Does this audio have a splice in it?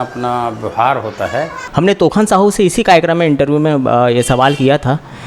yes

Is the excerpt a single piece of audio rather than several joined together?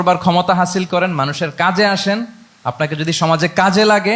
yes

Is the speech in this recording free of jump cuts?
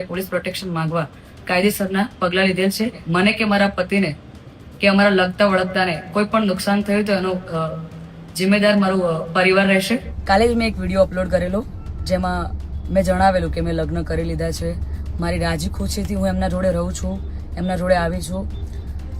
no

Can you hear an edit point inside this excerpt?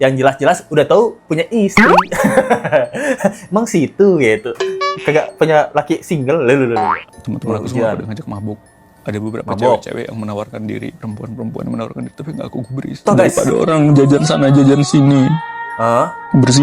yes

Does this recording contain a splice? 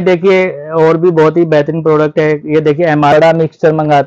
yes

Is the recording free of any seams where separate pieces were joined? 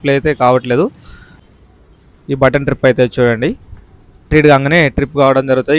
no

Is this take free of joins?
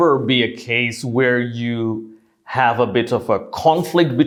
yes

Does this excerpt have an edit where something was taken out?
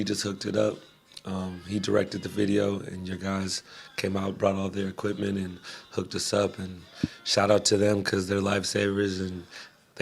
yes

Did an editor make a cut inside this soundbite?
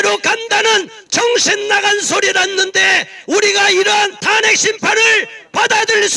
yes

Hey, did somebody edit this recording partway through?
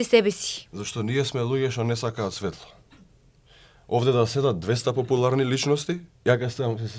no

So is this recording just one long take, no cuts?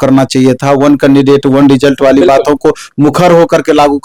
yes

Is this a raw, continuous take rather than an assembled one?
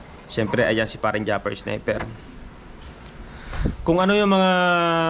yes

